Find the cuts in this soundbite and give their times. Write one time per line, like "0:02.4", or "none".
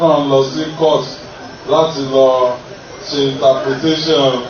none